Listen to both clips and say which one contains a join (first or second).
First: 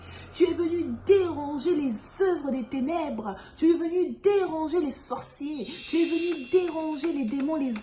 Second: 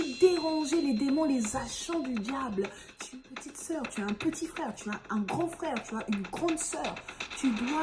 second